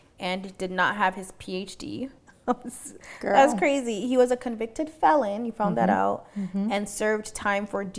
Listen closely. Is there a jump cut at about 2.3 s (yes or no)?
yes